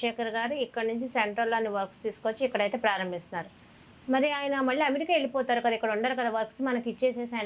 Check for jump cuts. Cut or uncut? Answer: uncut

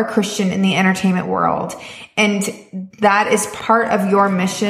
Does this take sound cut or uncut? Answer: cut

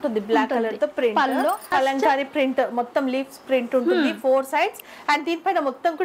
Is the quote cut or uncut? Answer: cut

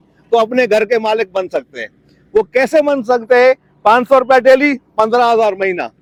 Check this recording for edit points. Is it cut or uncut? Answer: uncut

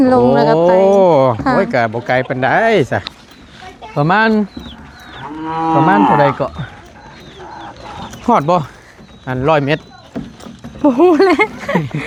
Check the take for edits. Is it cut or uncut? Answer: uncut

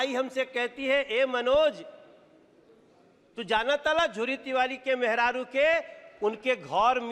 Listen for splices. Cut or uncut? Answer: uncut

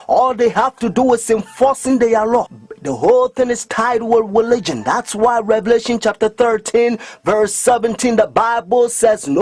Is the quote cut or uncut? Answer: cut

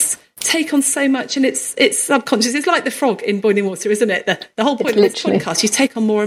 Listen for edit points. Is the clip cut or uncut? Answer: uncut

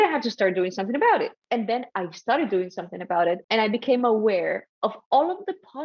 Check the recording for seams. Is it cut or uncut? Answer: cut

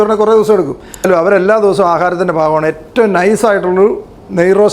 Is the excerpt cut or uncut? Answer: cut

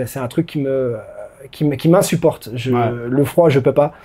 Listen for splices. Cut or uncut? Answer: uncut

